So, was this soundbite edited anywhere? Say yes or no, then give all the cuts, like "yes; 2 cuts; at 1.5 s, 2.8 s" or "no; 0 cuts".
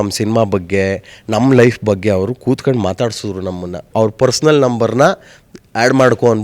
yes; 1 cut; at 3.9 s